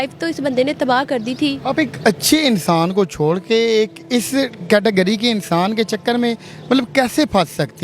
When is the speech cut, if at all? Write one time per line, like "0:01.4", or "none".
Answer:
none